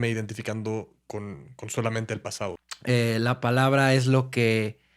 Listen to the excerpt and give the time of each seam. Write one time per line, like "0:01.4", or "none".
0:02.6